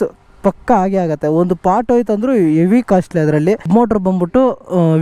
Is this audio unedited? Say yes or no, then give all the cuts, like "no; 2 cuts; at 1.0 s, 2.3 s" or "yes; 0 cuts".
no; 1 cut; at 3.6 s